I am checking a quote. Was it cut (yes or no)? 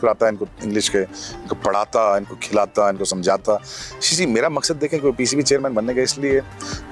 no